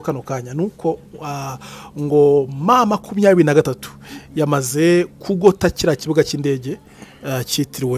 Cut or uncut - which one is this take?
uncut